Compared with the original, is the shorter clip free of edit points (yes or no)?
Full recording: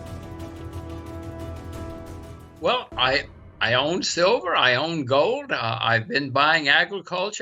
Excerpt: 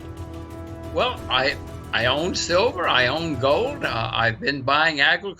no